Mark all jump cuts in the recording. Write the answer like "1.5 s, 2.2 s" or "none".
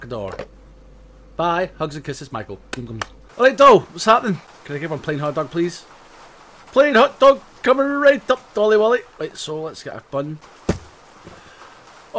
3.2 s, 4.5 s, 10.5 s